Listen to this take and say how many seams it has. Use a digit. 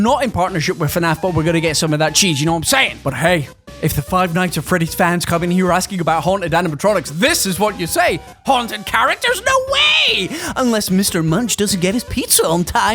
1